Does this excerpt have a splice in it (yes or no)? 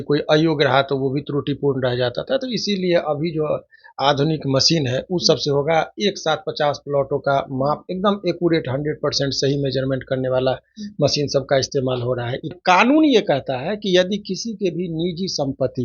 yes